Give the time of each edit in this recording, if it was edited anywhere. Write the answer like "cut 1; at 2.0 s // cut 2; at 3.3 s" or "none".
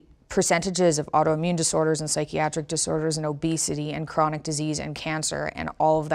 none